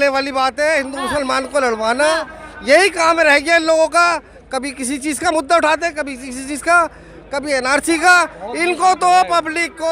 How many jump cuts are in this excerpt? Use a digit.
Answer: 0